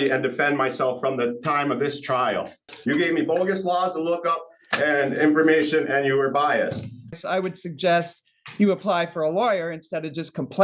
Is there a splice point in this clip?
yes; 2 cuts; at 2.6 s, 7.2 s

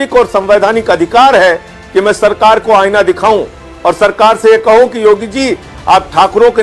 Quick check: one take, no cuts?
yes; 0 cuts

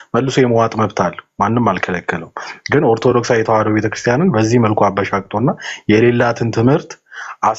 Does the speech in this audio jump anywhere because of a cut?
no; 0 cuts

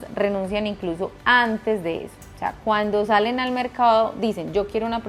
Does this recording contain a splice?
no; 0 cuts

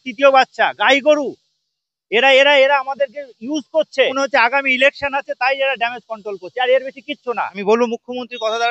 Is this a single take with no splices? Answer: no; 2 cuts; at 4.1 s, 7.6 s

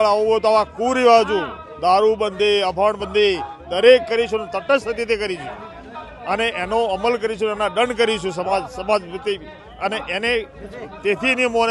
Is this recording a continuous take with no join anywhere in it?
yes; 0 cuts

